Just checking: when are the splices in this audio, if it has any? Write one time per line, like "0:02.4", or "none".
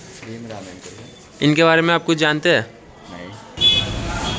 0:01.1
0:03.6